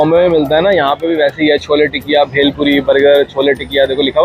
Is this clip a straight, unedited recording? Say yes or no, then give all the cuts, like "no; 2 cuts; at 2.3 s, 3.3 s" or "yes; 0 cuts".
yes; 0 cuts